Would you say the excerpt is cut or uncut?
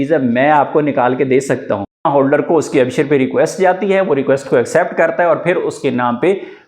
cut